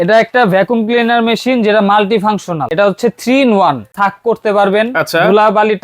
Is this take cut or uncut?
cut